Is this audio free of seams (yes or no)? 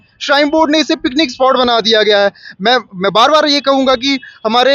yes